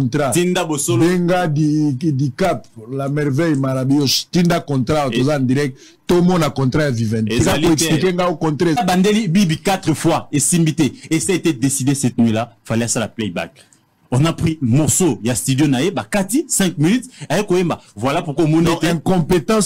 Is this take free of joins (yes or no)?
yes